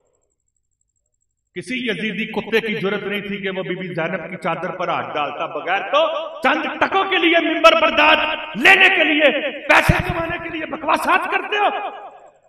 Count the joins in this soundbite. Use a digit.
0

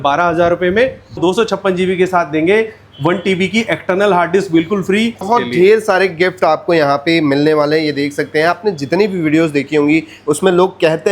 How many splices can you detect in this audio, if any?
2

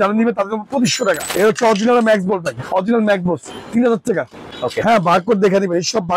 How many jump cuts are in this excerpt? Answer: 2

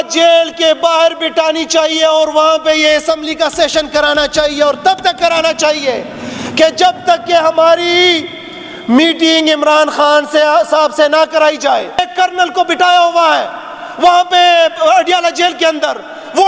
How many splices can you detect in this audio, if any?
1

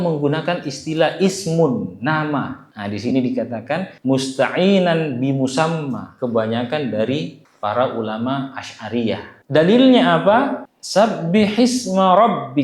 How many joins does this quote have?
2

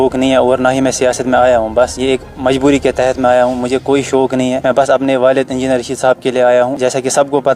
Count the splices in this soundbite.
3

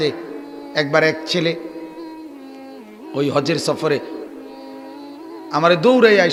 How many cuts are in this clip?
0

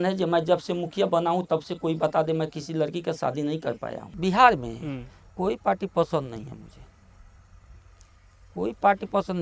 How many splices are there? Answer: 1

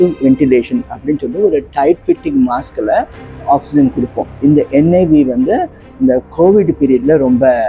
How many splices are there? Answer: 1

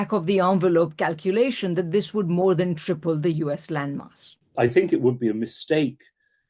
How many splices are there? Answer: 1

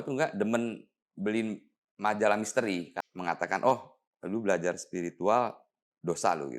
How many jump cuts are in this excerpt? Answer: 1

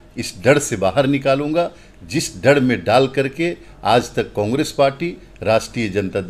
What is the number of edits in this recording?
0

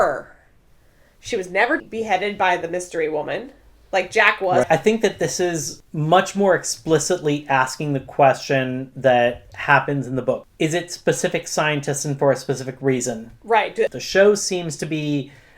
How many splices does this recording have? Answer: 4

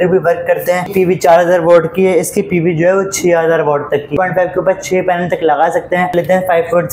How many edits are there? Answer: 3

